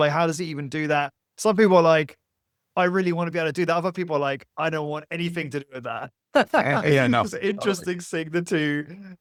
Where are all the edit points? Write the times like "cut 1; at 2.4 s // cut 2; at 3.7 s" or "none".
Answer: none